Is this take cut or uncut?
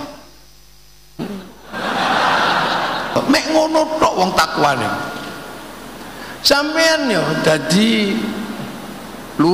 cut